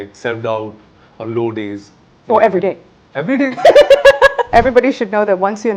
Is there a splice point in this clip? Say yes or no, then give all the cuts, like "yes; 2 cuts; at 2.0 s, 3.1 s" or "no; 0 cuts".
yes; 1 cut; at 4.5 s